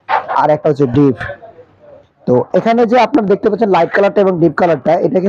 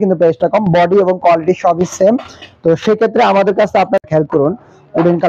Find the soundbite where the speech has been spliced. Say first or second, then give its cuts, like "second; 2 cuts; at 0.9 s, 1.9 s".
second; 1 cut; at 4.0 s